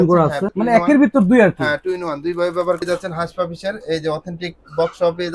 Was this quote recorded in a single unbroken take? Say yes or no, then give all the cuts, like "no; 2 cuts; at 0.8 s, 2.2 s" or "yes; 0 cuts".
no; 1 cut; at 2.8 s